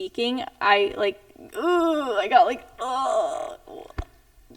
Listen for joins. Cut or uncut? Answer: uncut